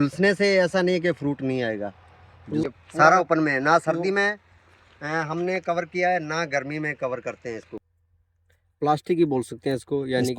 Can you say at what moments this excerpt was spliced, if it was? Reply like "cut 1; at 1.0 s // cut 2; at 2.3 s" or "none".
cut 1; at 2.7 s // cut 2; at 8.0 s

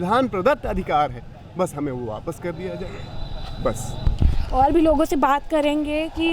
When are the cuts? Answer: none

